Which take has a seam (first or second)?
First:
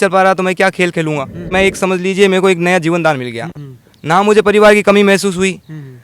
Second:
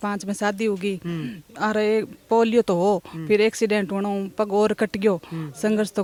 first